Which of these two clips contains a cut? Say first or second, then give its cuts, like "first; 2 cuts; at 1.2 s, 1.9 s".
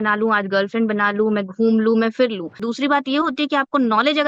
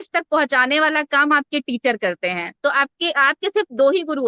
first; 1 cut; at 2.6 s